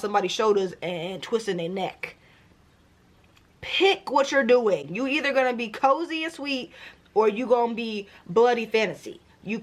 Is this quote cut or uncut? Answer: uncut